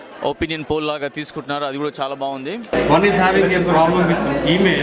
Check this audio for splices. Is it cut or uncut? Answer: cut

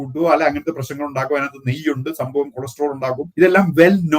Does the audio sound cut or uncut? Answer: cut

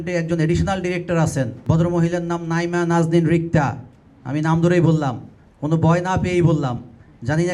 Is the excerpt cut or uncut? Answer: cut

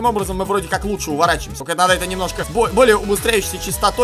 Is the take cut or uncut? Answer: cut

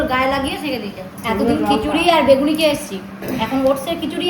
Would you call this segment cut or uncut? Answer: uncut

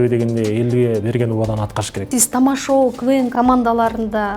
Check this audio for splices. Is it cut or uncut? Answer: cut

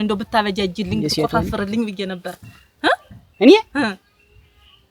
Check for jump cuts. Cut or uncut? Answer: uncut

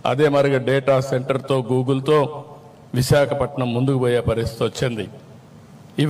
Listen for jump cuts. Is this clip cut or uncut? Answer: uncut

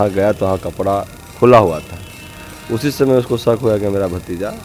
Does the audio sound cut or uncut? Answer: uncut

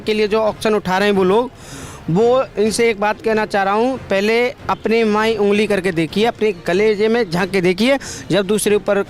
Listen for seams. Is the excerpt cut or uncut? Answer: uncut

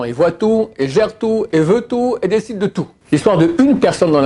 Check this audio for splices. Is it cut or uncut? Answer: cut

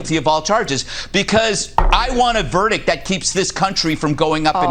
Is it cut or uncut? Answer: uncut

